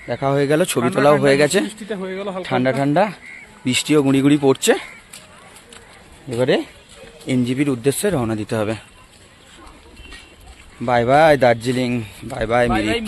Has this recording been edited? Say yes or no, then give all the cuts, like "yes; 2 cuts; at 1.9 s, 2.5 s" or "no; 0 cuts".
no; 0 cuts